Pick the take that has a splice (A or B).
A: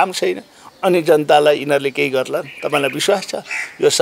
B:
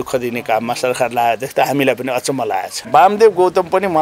B